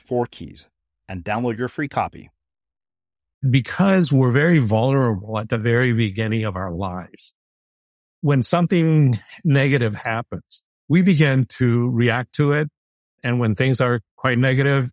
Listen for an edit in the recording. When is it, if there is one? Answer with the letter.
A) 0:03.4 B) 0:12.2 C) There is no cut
A